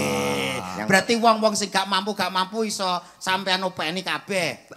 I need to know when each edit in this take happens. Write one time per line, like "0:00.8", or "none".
none